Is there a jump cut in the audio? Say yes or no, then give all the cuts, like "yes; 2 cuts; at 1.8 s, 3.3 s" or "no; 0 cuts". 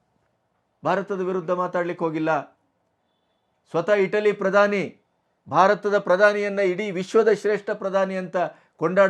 no; 0 cuts